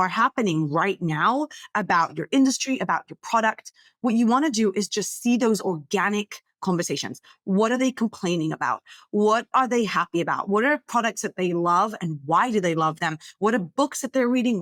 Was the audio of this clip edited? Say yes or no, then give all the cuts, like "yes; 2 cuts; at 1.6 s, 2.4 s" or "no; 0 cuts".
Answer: no; 0 cuts